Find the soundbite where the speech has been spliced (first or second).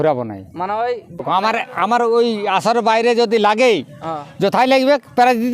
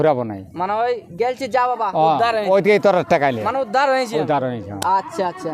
first